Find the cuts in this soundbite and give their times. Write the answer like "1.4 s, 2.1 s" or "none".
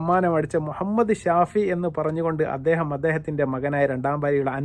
none